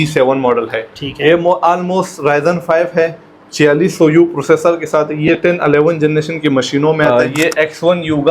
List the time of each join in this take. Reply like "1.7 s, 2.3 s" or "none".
7.1 s